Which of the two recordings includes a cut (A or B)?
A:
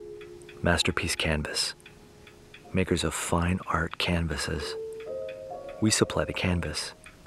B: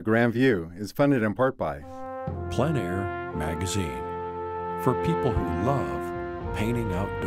B